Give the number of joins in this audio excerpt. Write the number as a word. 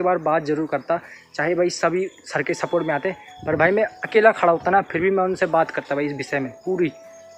zero